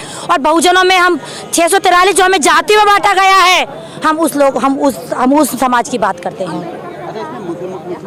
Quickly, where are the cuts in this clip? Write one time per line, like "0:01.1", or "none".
none